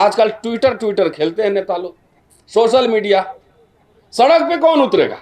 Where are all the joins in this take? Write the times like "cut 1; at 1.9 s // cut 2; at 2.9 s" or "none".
none

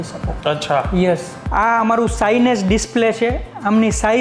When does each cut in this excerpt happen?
cut 1; at 1.4 s

